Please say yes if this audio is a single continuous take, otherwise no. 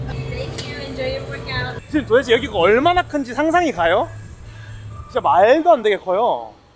no